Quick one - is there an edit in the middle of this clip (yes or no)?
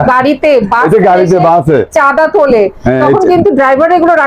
no